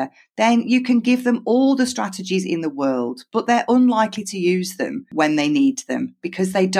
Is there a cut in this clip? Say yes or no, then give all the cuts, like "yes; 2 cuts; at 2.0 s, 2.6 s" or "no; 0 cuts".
yes; 1 cut; at 5.1 s